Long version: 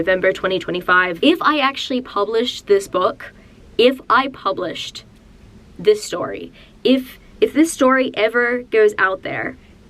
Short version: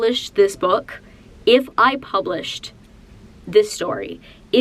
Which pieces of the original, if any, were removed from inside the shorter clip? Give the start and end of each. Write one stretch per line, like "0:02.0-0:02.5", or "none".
none

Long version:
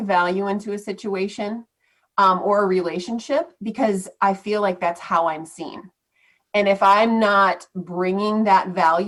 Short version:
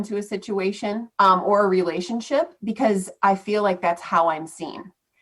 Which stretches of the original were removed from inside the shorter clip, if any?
0:01.6-0:02.0

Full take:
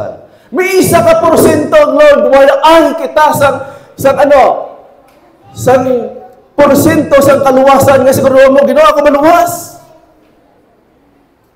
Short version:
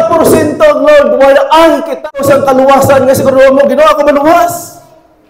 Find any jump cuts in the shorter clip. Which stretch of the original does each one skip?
0:03.2-0:07.1

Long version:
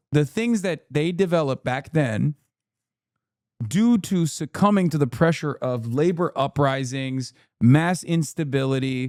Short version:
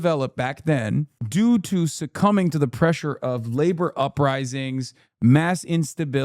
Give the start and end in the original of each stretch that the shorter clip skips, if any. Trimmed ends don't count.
0:02.4-0:03.6

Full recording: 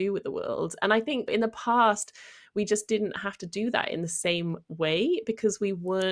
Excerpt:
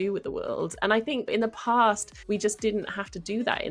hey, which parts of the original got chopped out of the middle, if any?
0:02.1-0:02.4

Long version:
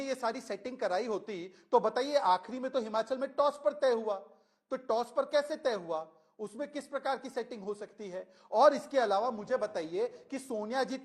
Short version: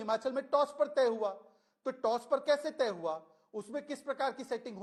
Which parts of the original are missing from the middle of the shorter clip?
none

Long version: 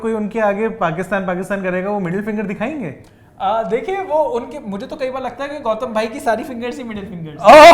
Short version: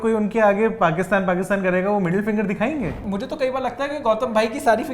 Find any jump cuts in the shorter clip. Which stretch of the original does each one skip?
0:03.1-0:04.7

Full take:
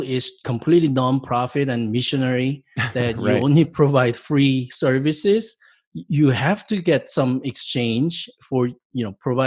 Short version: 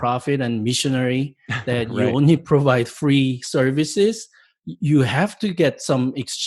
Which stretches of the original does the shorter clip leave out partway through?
none

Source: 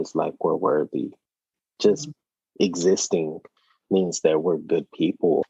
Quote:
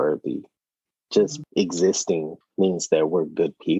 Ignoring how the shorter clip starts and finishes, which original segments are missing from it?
0:02.1-0:02.4
0:03.4-0:03.7

